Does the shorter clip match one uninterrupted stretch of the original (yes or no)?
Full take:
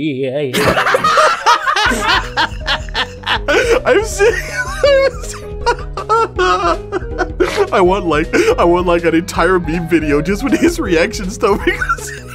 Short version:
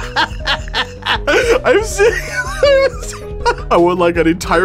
no